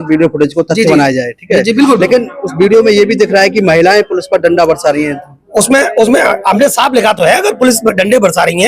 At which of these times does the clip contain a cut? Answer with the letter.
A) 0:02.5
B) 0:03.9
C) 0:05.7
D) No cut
D